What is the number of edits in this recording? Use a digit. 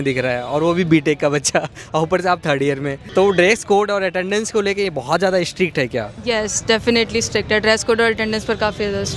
0